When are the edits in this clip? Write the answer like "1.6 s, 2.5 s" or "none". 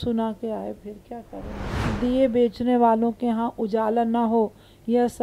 1.8 s